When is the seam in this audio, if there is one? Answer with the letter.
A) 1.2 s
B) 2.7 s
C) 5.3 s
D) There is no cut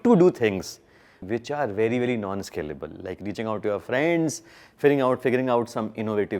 A